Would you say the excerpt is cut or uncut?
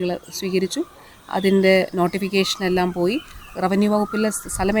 uncut